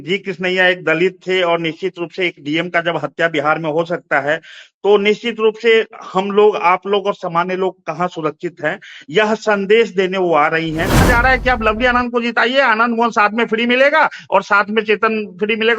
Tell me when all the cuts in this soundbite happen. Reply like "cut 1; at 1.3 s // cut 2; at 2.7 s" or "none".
cut 1; at 11.1 s